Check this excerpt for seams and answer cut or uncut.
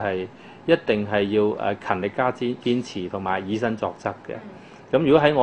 uncut